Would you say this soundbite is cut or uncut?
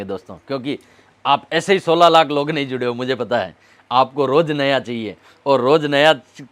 uncut